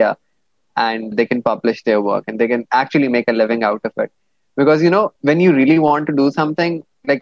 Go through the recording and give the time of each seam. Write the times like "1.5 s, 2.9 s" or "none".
1.1 s, 5.1 s